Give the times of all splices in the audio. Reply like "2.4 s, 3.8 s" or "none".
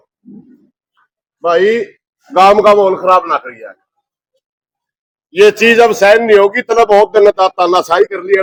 none